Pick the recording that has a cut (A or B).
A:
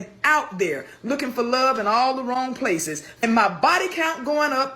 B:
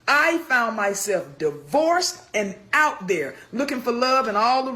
A